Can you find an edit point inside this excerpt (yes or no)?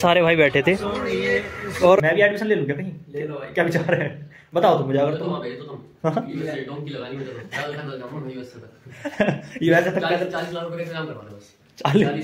yes